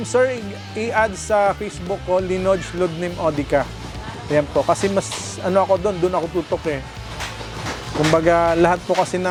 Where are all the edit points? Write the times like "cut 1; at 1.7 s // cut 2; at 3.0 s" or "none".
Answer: none